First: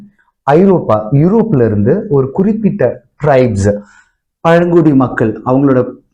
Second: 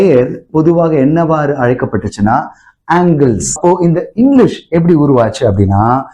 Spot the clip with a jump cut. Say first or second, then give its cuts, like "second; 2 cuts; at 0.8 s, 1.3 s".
second; 1 cut; at 3.6 s